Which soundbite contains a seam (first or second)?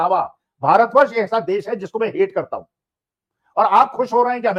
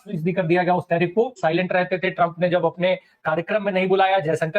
second